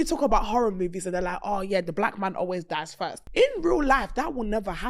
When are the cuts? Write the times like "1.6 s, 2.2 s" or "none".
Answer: 3.2 s